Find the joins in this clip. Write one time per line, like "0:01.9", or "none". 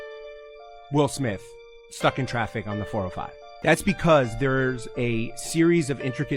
0:03.5